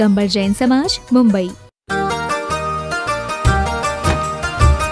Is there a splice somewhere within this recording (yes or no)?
yes